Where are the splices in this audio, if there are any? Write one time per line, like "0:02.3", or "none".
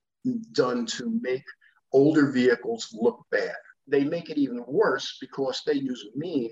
0:03.8